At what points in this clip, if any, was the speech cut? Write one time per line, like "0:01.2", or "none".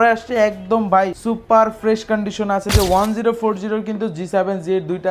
0:01.2
0:02.7